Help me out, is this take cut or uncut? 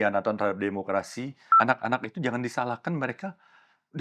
cut